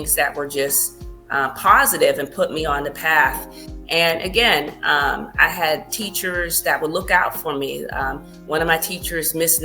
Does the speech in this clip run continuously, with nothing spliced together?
yes; 0 cuts

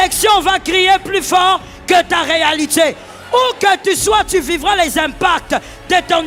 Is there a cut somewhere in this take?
no; 0 cuts

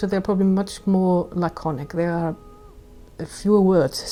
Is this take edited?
no; 0 cuts

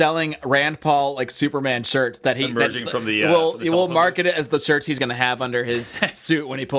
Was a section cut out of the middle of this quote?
no; 0 cuts

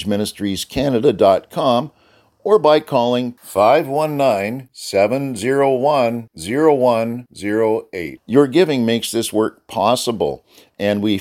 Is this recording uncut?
yes; 0 cuts

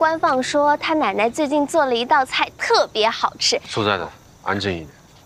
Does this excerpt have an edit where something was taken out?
no; 0 cuts

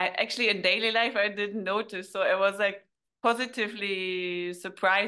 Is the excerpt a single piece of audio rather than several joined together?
yes; 0 cuts

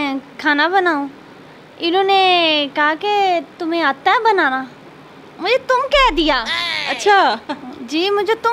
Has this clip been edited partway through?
no; 0 cuts

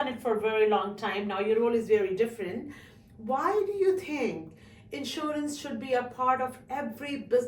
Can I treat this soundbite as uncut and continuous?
yes; 0 cuts

